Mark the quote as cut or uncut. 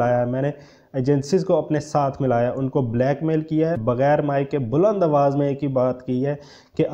cut